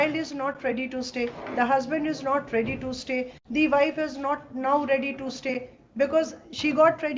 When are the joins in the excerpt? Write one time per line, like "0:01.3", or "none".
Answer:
none